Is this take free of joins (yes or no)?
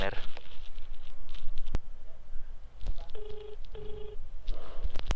yes